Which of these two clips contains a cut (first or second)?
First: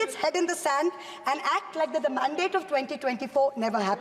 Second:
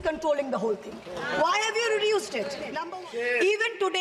second